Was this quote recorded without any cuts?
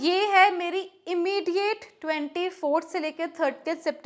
yes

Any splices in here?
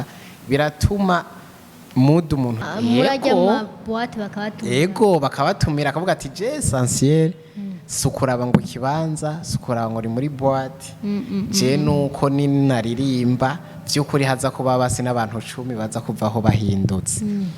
yes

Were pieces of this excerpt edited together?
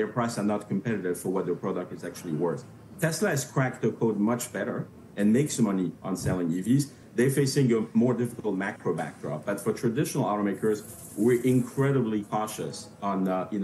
no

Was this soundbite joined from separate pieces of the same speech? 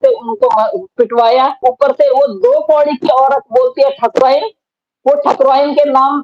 yes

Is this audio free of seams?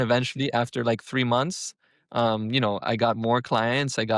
yes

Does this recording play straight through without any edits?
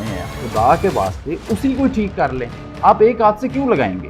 yes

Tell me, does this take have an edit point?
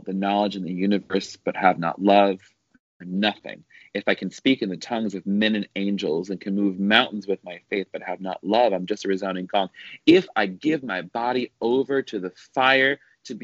no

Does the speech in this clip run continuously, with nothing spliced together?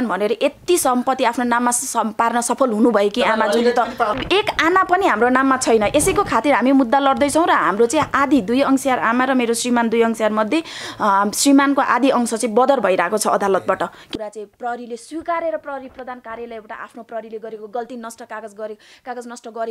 no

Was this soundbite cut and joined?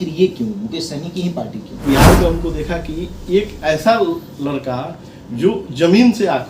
yes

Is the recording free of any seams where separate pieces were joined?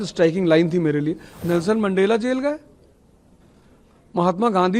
no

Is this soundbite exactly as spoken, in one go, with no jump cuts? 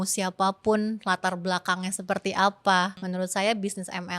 no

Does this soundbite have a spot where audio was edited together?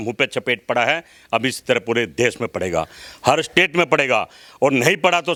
no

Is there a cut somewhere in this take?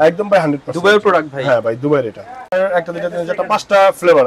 yes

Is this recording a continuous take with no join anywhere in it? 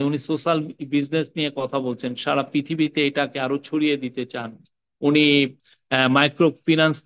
no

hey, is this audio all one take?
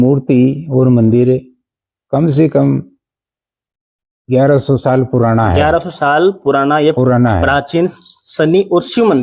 yes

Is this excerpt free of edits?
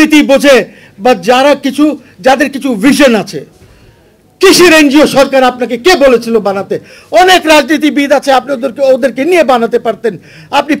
yes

